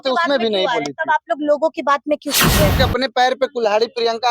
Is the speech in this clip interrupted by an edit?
yes; 1 cut; at 2.8 s

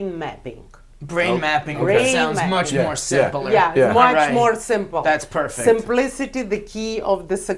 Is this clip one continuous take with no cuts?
yes; 0 cuts

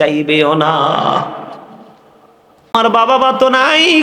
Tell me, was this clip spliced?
yes; 1 cut; at 2.7 s

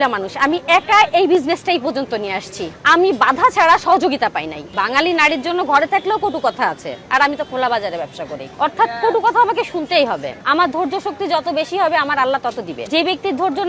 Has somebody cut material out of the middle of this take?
yes; 3 cuts; at 4.6 s, 10.3 s, 12.8 s

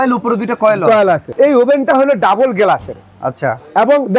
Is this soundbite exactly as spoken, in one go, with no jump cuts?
no; 1 cut; at 1.3 s

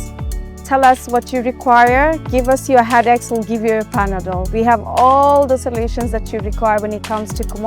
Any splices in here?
no; 0 cuts

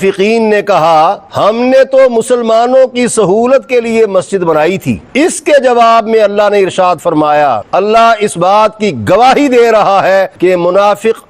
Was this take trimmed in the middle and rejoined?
yes; 2 cuts; at 5.0 s, 7.6 s

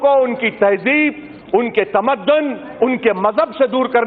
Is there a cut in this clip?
no; 0 cuts

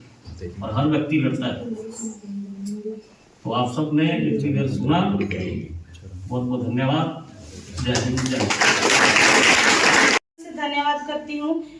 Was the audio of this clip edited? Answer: no; 0 cuts

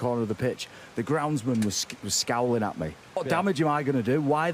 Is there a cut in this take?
yes; 1 cut; at 3.2 s

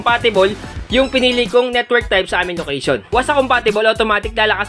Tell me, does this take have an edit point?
yes; 1 cut; at 3.0 s

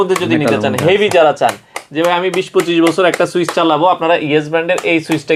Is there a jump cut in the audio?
no; 0 cuts

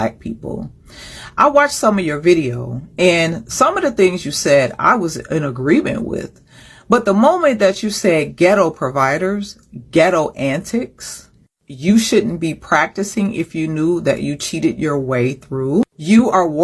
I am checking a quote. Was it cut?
no; 0 cuts

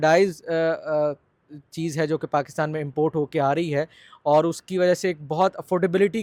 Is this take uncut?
yes; 0 cuts

